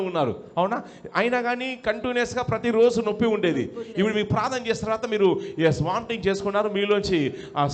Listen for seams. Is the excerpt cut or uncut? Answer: uncut